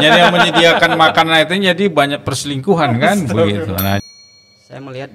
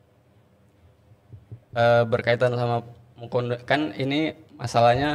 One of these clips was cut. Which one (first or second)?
first